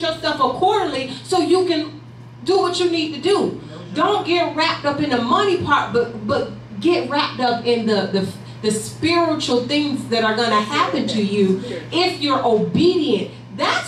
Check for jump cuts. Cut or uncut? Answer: uncut